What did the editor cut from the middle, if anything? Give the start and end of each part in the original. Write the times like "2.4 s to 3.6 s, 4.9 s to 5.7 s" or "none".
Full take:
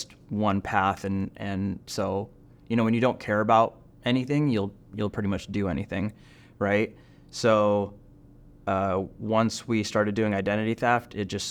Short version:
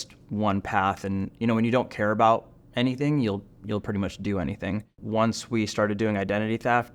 1.3 s to 2.6 s, 6.3 s to 9.2 s